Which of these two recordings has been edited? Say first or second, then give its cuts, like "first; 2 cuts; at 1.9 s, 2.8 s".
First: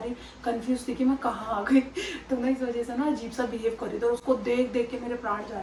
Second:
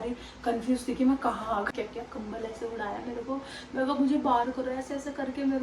second; 1 cut; at 1.7 s